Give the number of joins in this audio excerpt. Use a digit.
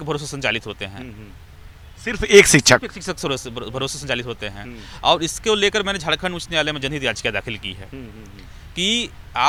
0